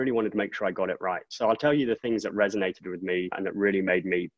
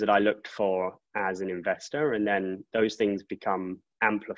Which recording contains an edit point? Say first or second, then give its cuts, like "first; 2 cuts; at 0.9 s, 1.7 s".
first; 2 cuts; at 1.3 s, 3.4 s